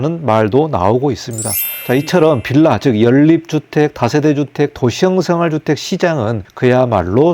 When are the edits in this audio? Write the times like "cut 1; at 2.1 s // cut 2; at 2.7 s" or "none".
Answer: cut 1; at 1.8 s // cut 2; at 6.4 s